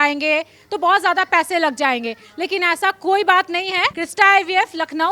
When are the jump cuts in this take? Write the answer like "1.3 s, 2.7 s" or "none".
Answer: 4.0 s